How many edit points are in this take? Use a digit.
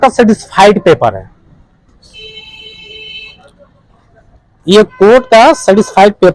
0